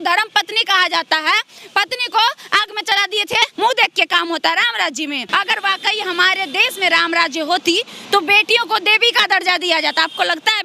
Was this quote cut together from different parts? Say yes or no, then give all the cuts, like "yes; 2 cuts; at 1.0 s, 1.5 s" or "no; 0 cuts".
yes; 2 cuts; at 3.5 s, 5.2 s